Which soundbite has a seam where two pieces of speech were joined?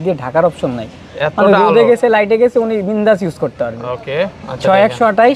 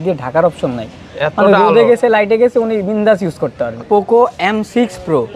second; 1 cut; at 3.8 s

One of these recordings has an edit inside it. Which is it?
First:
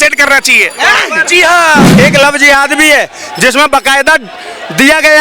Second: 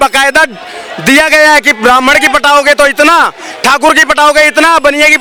first; 1 cut; at 1.9 s

